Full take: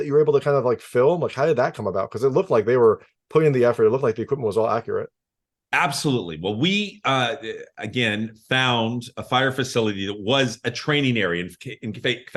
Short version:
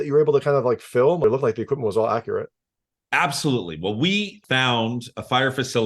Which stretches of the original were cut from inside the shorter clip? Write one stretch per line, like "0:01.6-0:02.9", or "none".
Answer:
0:01.2-0:03.8
0:07.0-0:08.4